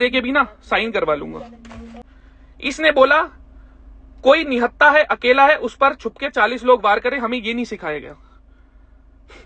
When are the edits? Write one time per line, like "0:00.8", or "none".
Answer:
0:01.7

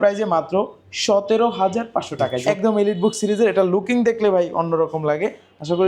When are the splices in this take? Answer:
0:02.4

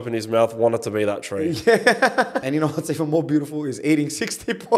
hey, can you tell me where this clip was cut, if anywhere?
0:02.4

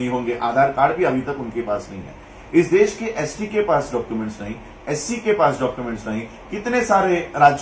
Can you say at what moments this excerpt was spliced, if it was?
none

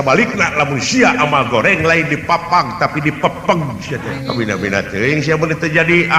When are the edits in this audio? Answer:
0:04.1

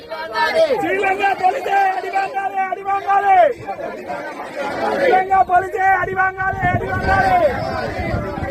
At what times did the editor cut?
none

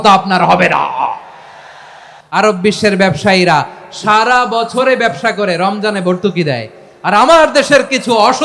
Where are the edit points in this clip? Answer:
0:02.4

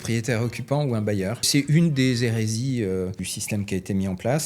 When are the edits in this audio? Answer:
0:01.5
0:03.3

